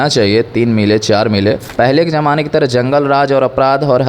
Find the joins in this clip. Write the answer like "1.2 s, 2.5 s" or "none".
1.7 s